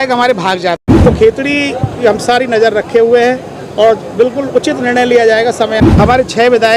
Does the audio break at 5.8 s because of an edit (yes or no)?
yes